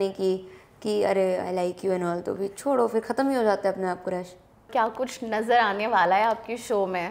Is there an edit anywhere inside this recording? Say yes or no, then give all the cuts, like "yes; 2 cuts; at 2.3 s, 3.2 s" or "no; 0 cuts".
yes; 1 cut; at 4.7 s